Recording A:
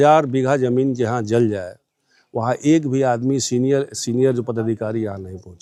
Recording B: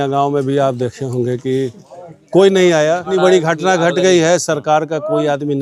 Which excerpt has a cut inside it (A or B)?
B